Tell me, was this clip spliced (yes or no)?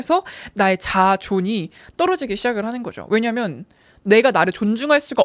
no